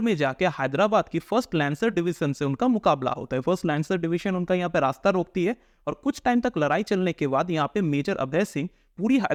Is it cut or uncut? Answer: uncut